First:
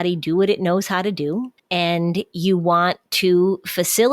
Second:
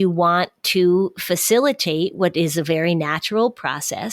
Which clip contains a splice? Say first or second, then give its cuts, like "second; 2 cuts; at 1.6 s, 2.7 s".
first; 1 cut; at 1.6 s